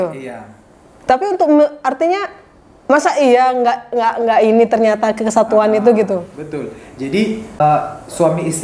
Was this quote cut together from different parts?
yes; 1 cut; at 7.6 s

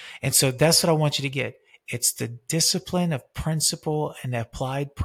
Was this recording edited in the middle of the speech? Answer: no; 0 cuts

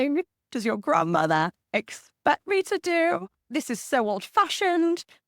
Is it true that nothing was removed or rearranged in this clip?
no; 1 cut; at 3.4 s

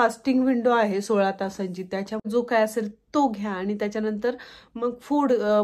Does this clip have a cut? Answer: yes; 1 cut; at 2.2 s

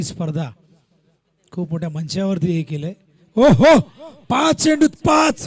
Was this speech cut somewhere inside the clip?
no; 0 cuts

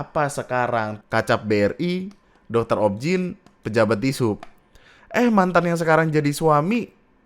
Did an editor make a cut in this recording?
yes; 1 cut; at 1.0 s

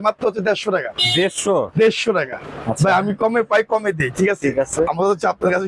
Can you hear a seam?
no; 0 cuts

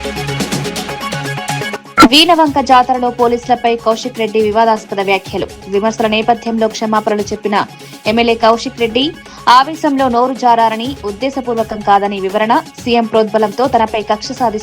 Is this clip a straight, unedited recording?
no; 1 cut; at 1.7 s

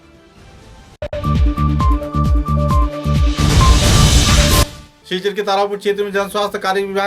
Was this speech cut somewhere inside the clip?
yes; 2 cuts; at 1.1 s, 4.6 s

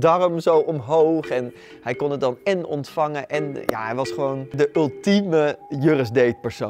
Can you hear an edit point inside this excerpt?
yes; 2 cuts; at 4.5 s, 5.7 s

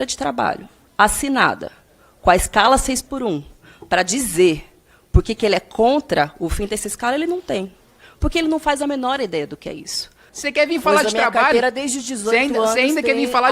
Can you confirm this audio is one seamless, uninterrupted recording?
no; 1 cut; at 10.4 s

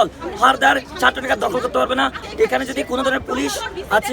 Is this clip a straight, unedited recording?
no; 1 cut; at 2.2 s

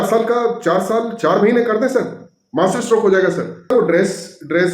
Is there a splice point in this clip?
yes; 1 cut; at 3.7 s

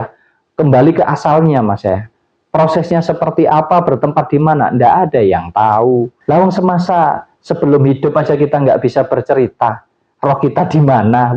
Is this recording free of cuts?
no; 1 cut; at 6.2 s

